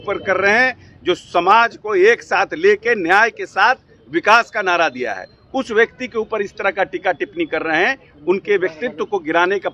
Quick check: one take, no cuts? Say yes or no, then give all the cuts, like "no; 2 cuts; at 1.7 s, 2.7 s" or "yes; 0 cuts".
yes; 0 cuts